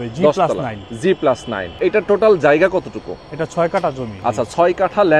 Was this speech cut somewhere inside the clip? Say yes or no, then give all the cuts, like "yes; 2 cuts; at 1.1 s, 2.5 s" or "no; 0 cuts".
yes; 2 cuts; at 1.8 s, 4.1 s